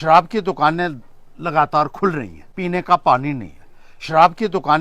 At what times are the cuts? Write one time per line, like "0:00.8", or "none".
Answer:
0:02.4